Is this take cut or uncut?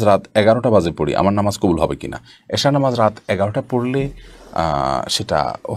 uncut